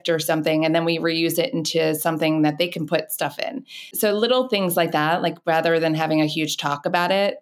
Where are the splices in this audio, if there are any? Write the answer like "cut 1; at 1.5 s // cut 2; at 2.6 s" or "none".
cut 1; at 3.9 s